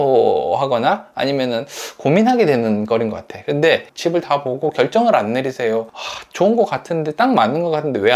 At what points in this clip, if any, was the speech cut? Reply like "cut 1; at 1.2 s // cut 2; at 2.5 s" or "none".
cut 1; at 3.8 s

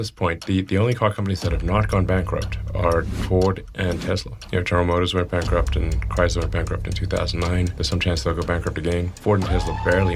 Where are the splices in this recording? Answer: cut 1; at 4.3 s // cut 2; at 7.7 s // cut 3; at 9.2 s

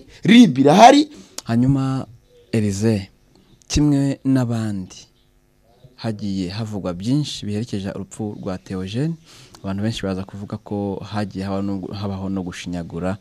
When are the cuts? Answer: cut 1; at 1.2 s

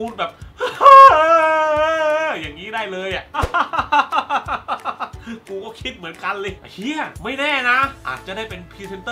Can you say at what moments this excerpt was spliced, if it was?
cut 1; at 3.3 s // cut 2; at 8.0 s

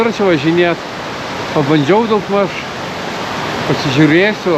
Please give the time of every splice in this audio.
none

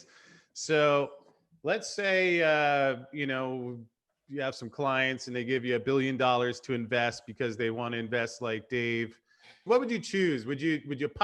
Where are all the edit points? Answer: cut 1; at 9.6 s

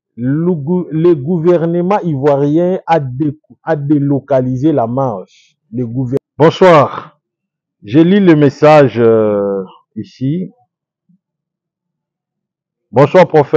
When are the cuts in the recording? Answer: cut 1; at 6.2 s

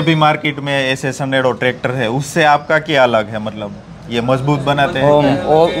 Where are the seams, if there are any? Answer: none

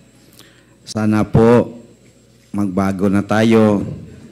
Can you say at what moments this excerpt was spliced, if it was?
none

